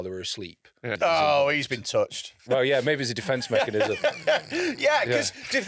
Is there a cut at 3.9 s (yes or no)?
no